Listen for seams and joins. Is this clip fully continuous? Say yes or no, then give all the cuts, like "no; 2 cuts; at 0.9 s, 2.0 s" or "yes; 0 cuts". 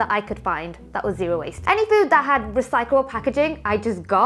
yes; 0 cuts